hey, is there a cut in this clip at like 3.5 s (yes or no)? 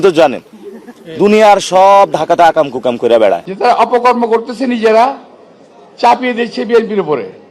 yes